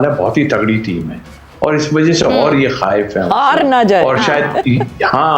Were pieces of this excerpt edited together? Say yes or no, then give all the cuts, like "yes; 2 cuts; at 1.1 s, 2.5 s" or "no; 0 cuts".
no; 0 cuts